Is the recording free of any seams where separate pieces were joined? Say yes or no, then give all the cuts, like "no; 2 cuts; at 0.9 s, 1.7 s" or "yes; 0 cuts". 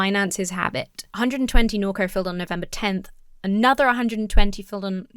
no; 1 cut; at 1.0 s